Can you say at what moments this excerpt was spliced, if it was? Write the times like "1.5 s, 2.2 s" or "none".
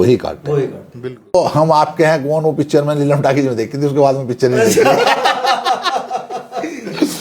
1.3 s